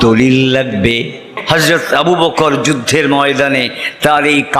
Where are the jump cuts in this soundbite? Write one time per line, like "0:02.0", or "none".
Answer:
0:01.3